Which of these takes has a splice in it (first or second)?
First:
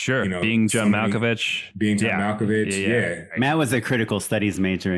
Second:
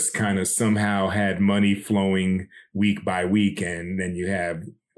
first